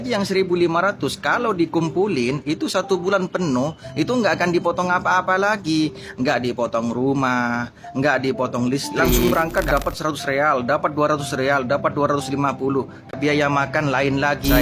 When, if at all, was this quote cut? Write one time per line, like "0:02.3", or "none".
0:09.3
0:13.1